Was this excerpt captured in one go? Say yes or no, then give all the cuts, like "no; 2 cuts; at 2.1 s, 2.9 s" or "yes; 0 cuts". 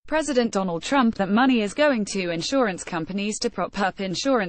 yes; 0 cuts